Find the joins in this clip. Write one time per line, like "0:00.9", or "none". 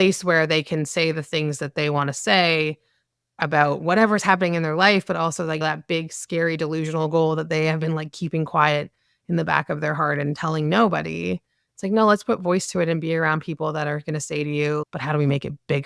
0:05.6
0:14.8